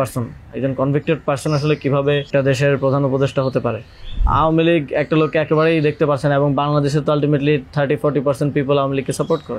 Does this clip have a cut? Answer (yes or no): yes